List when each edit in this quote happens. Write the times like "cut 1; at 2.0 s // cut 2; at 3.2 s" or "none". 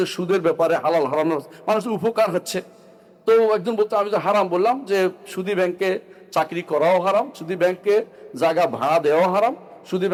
none